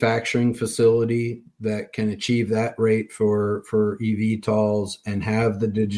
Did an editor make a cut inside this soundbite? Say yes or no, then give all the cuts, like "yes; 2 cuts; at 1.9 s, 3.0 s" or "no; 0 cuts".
no; 0 cuts